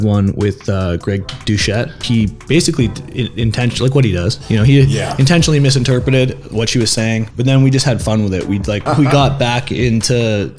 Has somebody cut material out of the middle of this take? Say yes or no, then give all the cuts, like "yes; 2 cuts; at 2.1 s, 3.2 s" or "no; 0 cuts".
yes; 3 cuts; at 2.0 s, 7.3 s, 8.8 s